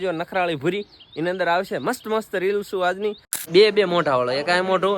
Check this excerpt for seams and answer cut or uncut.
cut